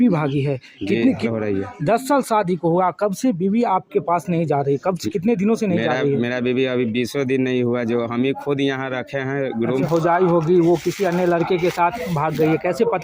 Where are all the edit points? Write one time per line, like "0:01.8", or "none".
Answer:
0:01.3
0:09.9